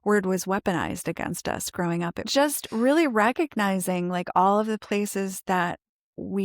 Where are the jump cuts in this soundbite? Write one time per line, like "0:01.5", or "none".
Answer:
0:02.3